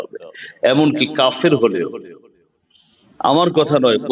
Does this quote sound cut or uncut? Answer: uncut